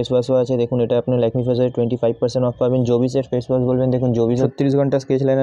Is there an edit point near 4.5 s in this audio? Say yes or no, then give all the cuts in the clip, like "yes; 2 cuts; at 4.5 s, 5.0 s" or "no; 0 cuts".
yes; 1 cut; at 4.5 s